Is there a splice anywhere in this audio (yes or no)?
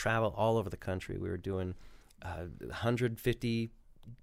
no